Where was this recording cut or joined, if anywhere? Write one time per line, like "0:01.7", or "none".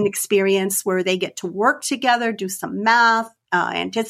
none